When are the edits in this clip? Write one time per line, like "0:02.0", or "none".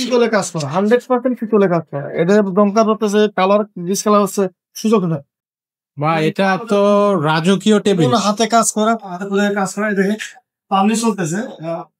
0:05.4